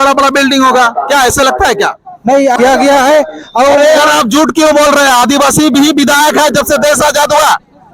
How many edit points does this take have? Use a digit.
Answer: 1